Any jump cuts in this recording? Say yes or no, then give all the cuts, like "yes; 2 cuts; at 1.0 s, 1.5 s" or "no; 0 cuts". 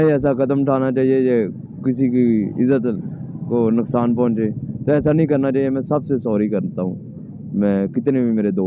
no; 0 cuts